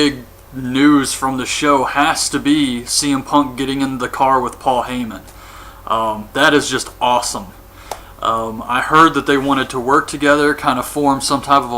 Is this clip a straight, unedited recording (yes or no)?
no